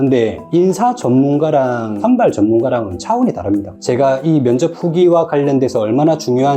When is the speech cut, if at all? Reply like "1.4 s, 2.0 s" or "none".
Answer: 3.7 s